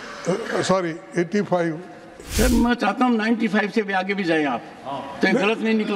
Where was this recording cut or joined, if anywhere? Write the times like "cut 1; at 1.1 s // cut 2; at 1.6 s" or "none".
cut 1; at 2.2 s

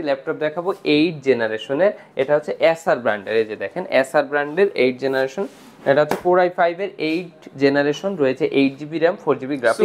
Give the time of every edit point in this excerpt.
none

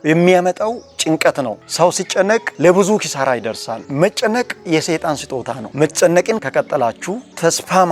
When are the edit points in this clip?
cut 1; at 3.8 s // cut 2; at 5.6 s // cut 3; at 6.4 s

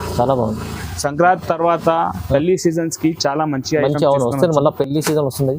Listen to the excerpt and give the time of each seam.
none

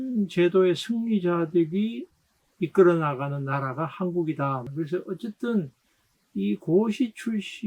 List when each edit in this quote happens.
cut 1; at 4.6 s

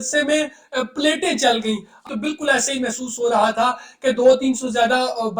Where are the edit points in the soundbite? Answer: cut 1; at 2.1 s

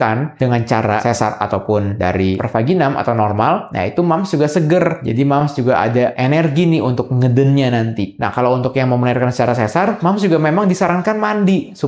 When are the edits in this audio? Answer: none

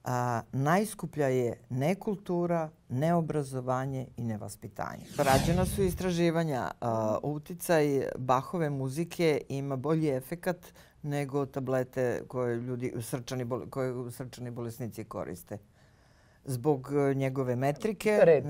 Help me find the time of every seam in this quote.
cut 1; at 5.2 s

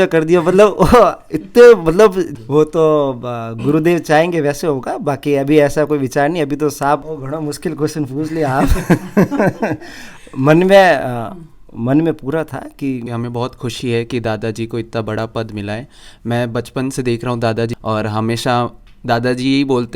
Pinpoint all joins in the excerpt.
cut 1; at 2.3 s // cut 2; at 7.1 s // cut 3; at 13.0 s // cut 4; at 17.8 s

